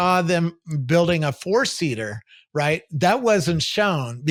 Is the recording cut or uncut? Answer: uncut